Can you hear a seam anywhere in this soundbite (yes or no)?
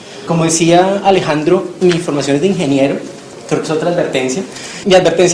no